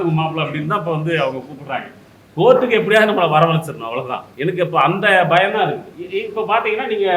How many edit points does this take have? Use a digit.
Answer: 2